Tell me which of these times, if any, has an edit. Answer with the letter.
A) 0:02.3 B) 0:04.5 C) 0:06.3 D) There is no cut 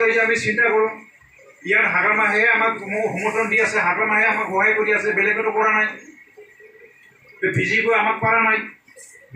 D